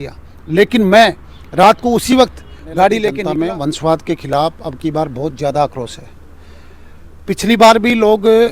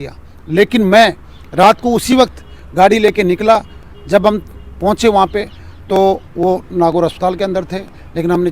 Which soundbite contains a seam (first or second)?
first